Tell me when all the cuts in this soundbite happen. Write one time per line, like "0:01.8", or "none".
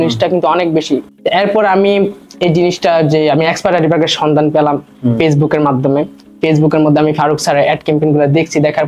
none